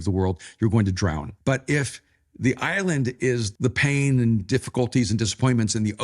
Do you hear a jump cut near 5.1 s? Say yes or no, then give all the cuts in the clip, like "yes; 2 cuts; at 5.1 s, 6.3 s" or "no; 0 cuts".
no; 2 cuts; at 1.3 s, 3.5 s